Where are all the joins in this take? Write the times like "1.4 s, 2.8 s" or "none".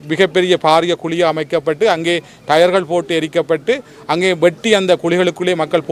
none

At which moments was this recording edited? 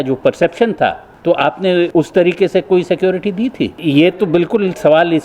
1.1 s, 1.9 s, 3.8 s

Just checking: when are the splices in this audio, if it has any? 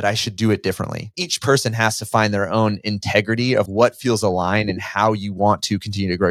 1.1 s, 3.6 s

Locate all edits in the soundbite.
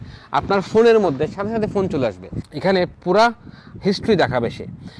2.7 s

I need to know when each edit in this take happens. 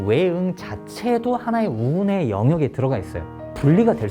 none

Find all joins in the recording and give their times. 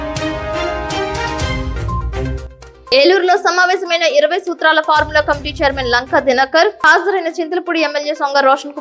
2.3 s

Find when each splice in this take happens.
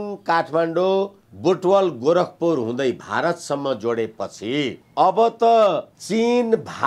1.2 s, 4.8 s, 5.9 s

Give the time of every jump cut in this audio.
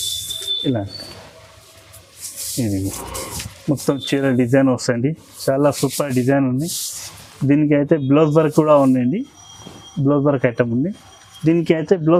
none

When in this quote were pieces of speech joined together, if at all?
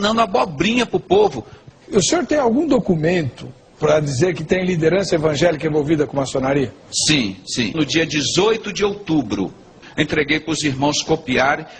9.8 s

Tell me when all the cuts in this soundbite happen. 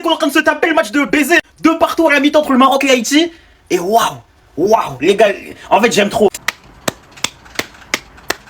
6.4 s

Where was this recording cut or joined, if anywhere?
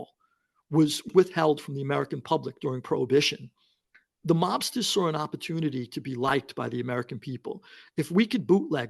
1.1 s

